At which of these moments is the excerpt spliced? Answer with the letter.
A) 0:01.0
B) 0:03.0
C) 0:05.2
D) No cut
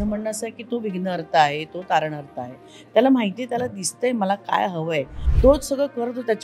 C